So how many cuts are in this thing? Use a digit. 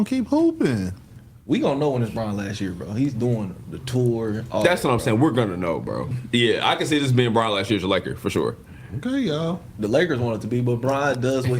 1